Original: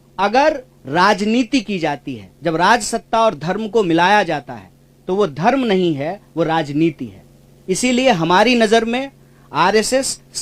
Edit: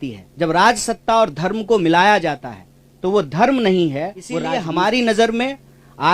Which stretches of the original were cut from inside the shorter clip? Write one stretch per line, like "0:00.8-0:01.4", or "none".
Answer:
0:06.5-0:08.0